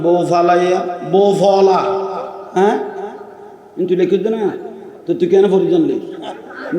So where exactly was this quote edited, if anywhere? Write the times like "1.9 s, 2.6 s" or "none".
2.4 s